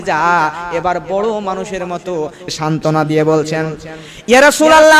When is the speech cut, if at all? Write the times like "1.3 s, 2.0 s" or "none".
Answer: 2.5 s

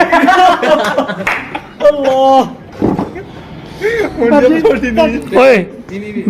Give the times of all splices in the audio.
5.2 s

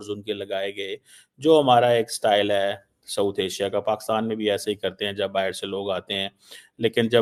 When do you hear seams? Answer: none

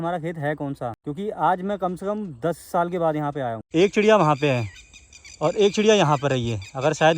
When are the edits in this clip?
1.0 s, 3.6 s

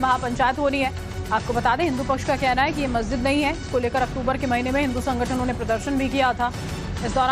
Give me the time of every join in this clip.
2.2 s

